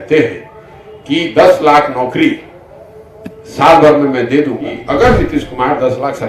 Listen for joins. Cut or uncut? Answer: cut